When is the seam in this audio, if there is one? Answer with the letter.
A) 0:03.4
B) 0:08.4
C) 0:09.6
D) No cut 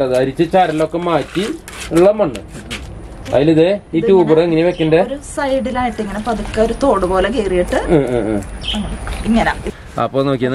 C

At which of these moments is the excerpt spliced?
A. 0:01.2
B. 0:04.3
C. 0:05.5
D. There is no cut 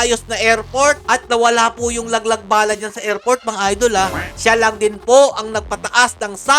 B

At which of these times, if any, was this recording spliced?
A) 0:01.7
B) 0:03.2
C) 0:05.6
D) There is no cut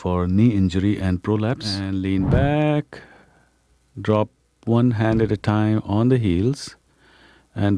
A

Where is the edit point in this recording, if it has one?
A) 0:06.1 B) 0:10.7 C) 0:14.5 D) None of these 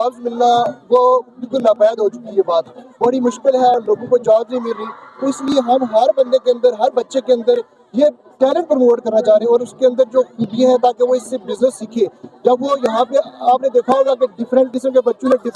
D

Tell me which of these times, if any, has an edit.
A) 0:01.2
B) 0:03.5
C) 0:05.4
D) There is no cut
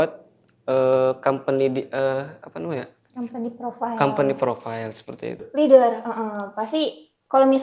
C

